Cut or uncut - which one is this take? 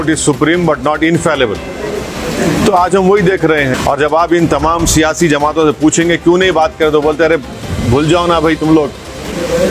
cut